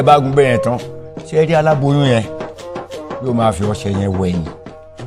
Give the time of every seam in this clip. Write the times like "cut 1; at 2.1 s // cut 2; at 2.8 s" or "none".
none